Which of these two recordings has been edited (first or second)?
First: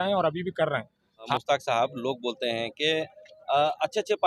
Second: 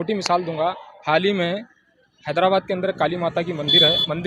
first